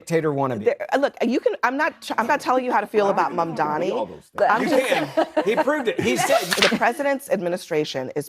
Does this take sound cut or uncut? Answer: cut